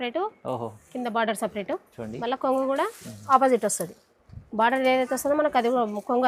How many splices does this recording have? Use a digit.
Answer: 0